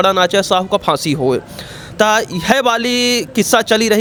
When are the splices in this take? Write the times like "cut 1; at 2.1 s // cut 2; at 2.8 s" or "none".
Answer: none